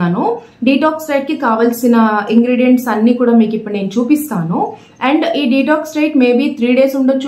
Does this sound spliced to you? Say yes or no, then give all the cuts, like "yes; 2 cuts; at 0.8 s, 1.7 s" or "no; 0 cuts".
yes; 1 cut; at 4.8 s